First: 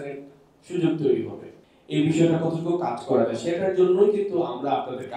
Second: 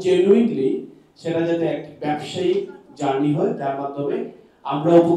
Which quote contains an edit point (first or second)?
first